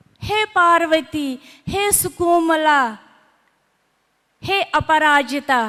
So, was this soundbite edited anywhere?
no; 0 cuts

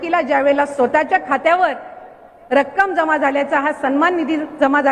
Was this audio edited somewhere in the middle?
no; 0 cuts

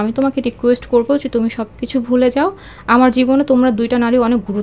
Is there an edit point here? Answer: no; 0 cuts

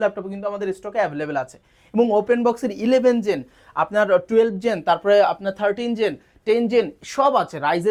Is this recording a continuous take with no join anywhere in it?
yes; 0 cuts

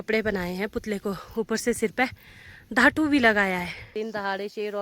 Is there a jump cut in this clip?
yes; 1 cut; at 3.8 s

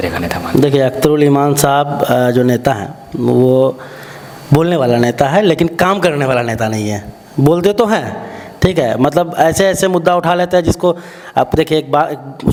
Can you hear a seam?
no; 0 cuts

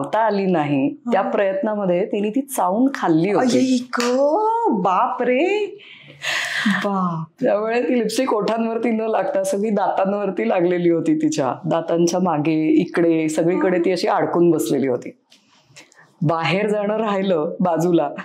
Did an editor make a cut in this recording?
no; 0 cuts

